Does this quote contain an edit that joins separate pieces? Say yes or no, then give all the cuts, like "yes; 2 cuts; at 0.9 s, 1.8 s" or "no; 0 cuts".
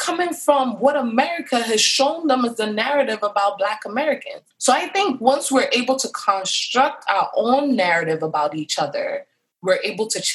no; 0 cuts